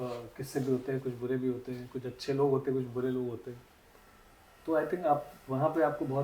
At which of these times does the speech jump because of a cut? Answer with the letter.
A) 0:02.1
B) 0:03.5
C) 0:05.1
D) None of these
D